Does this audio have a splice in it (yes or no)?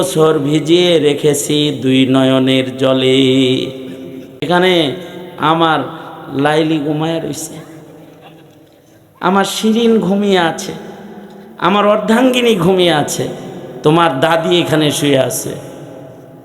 yes